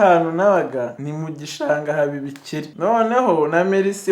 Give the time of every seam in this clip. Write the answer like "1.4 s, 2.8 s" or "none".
1.0 s, 2.7 s